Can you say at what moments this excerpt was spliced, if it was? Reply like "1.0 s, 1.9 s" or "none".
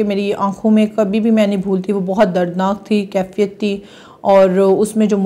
none

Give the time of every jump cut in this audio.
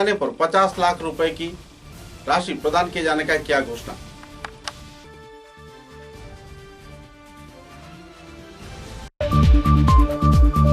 9.1 s

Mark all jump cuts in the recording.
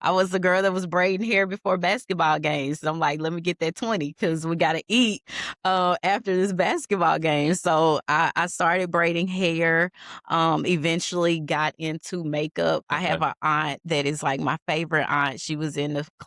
none

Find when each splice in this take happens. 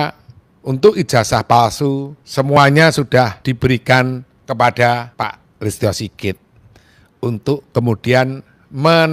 2.2 s, 3.4 s, 4.3 s, 5.1 s

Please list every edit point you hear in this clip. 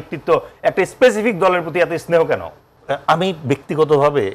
2.7 s

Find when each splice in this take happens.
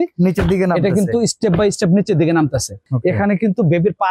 2.8 s

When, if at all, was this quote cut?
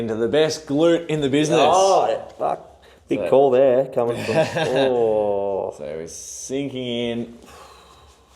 none

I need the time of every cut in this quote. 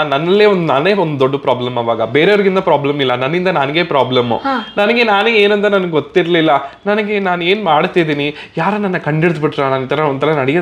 none

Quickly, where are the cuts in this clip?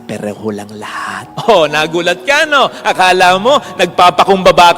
1.3 s

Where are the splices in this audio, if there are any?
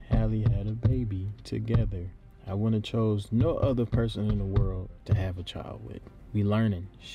none

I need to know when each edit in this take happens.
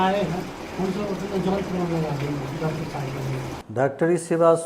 3.6 s

